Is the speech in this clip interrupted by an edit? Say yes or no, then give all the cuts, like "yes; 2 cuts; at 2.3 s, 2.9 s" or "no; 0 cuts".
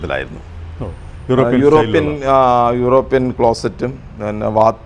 no; 0 cuts